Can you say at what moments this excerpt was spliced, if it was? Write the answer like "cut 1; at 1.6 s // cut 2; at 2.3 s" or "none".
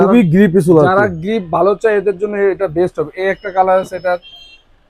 none